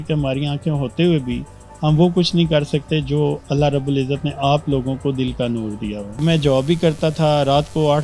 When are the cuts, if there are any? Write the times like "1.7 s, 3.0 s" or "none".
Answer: 6.2 s